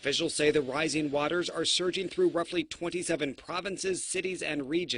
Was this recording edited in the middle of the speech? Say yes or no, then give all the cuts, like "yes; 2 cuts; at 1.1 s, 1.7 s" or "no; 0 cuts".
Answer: no; 0 cuts